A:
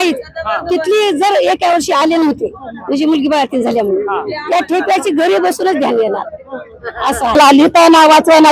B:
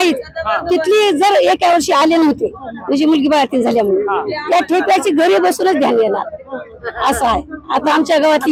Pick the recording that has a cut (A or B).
A